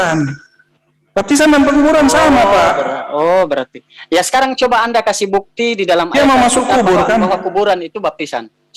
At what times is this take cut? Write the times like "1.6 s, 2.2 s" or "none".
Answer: none